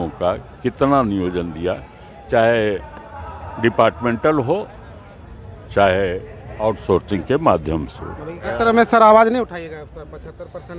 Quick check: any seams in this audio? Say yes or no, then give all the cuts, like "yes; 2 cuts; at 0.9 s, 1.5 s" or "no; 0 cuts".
yes; 1 cut; at 8.5 s